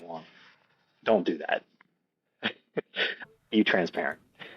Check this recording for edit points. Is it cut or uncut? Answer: cut